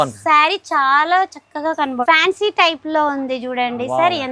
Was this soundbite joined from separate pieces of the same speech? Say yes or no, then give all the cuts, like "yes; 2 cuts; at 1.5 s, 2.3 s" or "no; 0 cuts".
yes; 1 cut; at 1.8 s